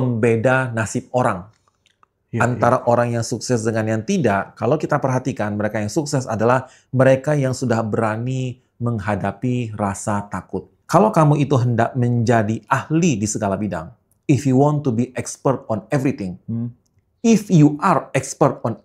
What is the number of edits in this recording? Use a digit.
1